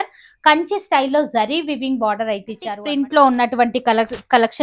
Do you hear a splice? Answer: yes; 1 cut; at 2.8 s

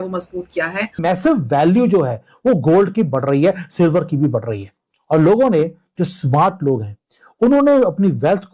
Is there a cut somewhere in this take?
yes; 1 cut; at 1.0 s

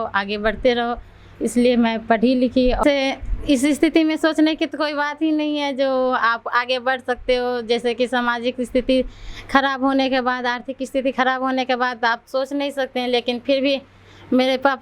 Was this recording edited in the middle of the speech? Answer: yes; 1 cut; at 2.8 s

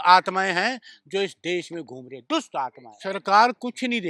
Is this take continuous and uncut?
no; 1 cut; at 2.9 s

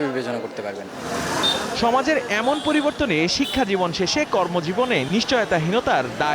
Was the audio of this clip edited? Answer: no; 0 cuts

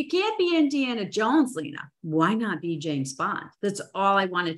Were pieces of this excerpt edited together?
yes; 1 cut; at 3.5 s

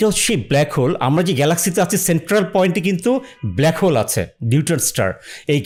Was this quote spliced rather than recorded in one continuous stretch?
no; 0 cuts

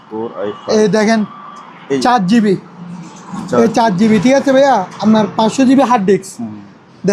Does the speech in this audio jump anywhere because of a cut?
no; 0 cuts

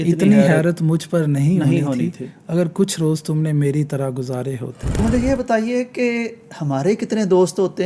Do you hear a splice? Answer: yes; 1 cut; at 5.0 s

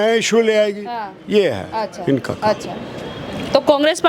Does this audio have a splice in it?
no; 0 cuts

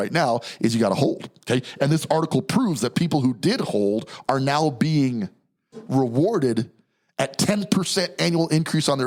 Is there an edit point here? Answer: no; 0 cuts

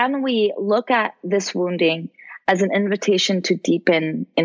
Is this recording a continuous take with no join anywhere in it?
yes; 0 cuts

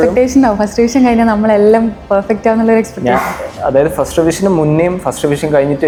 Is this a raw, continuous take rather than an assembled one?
yes; 0 cuts

